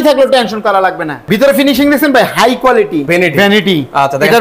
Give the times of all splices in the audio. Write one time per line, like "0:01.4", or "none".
0:01.3
0:03.1